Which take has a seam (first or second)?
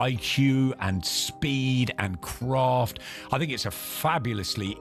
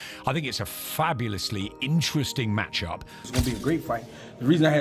second